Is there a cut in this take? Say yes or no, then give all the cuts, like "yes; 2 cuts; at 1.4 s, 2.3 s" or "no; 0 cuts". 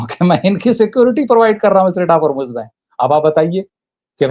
no; 0 cuts